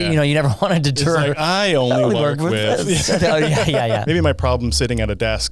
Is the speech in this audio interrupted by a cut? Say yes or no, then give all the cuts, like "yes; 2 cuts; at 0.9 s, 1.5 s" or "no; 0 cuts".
yes; 1 cut; at 4.0 s